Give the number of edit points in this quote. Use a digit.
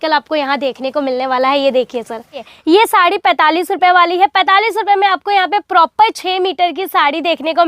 1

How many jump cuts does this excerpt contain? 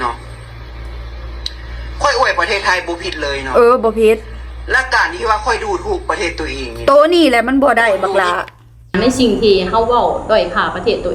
1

